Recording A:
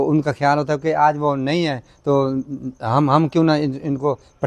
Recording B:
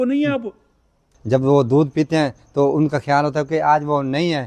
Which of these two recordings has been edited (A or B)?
B